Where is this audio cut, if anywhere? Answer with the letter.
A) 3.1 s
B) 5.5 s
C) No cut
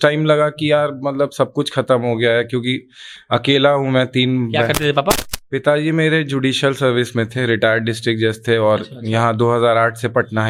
C